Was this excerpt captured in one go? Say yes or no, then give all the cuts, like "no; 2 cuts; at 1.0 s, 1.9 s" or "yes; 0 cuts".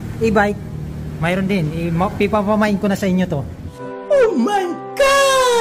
yes; 0 cuts